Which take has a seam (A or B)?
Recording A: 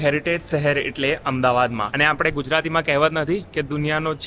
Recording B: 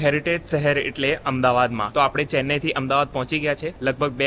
A